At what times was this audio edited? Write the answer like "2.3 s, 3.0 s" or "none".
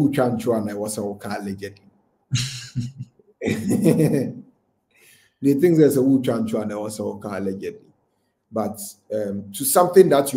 none